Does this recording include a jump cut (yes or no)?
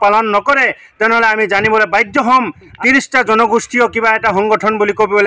yes